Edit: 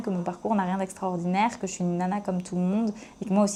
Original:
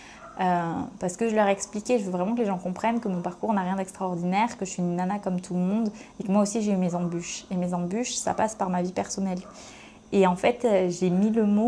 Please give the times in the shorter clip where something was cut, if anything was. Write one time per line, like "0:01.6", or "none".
none